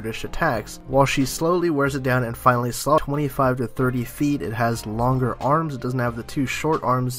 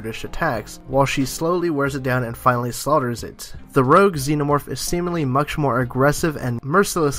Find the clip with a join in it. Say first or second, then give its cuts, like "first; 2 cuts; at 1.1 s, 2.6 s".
second; 1 cut; at 3.0 s